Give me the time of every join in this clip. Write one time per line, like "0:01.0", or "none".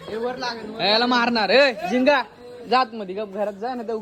none